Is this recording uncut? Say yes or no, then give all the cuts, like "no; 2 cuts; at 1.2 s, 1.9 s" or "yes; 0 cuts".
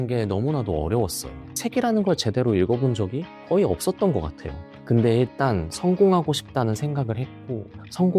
no; 1 cut; at 1.5 s